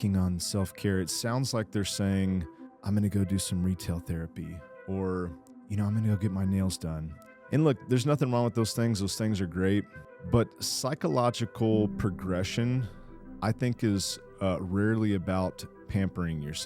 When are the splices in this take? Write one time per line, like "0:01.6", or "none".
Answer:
none

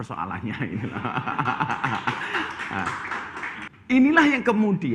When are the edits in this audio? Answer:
0:03.6

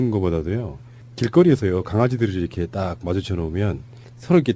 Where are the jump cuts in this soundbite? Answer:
none

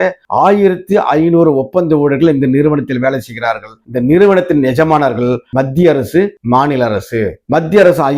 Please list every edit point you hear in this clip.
none

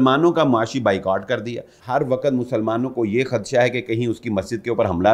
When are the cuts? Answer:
0:01.7

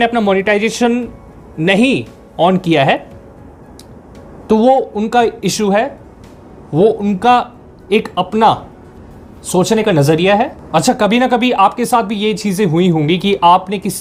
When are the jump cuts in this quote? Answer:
none

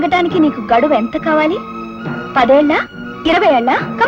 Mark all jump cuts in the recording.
none

